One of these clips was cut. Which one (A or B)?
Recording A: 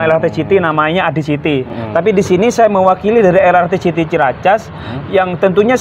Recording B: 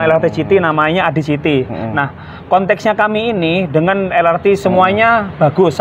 A